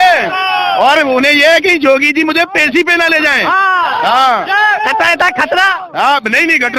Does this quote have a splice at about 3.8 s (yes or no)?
no